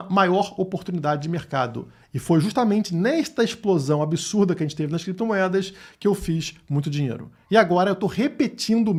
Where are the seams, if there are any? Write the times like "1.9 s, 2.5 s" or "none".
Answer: none